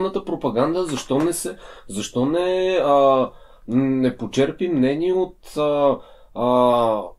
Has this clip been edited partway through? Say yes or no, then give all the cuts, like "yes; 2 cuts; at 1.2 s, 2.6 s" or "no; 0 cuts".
no; 0 cuts